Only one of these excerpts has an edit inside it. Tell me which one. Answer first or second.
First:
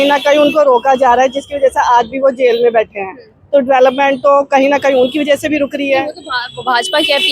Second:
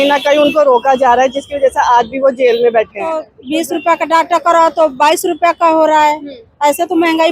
second